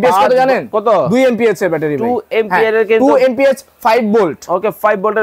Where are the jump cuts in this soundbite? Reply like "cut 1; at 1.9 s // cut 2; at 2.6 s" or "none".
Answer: none

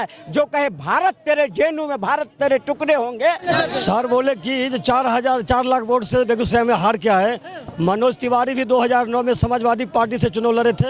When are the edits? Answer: cut 1; at 3.4 s

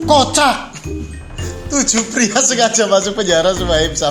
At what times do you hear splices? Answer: none

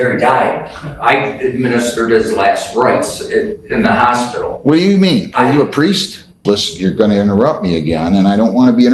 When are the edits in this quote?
cut 1; at 6.4 s

